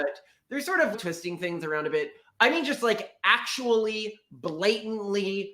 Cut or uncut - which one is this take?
cut